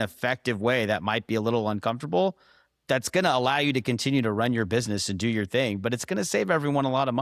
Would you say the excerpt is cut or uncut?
uncut